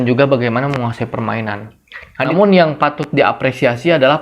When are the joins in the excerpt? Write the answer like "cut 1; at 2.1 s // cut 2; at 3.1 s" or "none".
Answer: cut 1; at 2.3 s

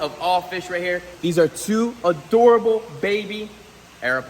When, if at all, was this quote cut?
cut 1; at 1.1 s

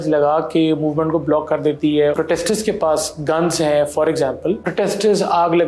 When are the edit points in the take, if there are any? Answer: cut 1; at 2.1 s // cut 2; at 4.6 s

